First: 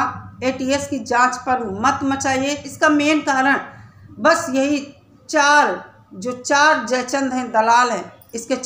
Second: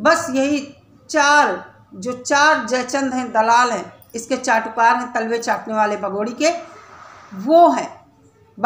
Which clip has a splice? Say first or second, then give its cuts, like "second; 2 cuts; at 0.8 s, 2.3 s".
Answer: first; 1 cut; at 2.6 s